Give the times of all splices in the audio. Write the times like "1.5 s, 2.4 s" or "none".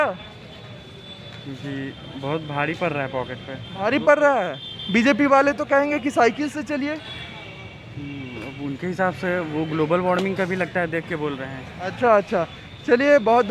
none